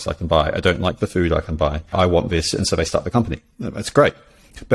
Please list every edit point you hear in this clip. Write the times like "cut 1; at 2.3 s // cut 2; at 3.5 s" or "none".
cut 1; at 1.9 s

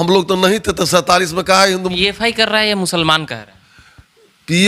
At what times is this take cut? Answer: cut 1; at 1.9 s

